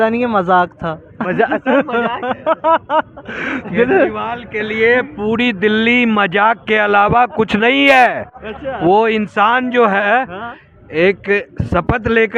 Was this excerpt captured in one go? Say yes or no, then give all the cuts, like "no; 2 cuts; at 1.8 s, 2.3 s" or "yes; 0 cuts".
yes; 0 cuts